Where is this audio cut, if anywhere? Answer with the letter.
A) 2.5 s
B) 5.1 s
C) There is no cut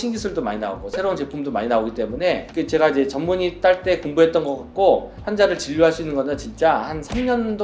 C